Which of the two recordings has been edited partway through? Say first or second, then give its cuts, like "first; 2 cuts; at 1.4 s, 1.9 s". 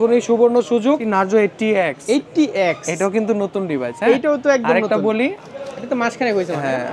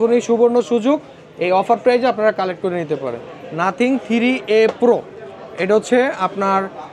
first; 2 cuts; at 1.1 s, 5.4 s